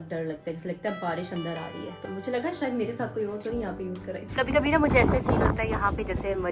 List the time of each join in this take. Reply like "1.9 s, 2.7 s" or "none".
2.0 s, 4.2 s